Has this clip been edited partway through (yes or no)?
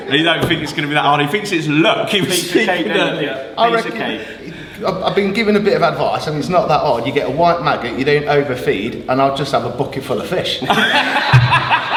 no